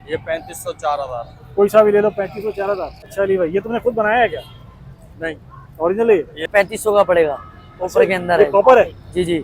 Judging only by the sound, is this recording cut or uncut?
cut